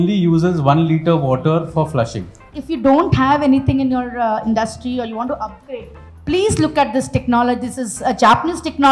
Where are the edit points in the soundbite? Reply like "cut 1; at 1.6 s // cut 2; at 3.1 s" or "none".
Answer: cut 1; at 2.6 s